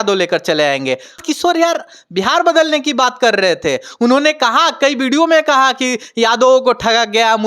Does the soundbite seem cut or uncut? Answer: cut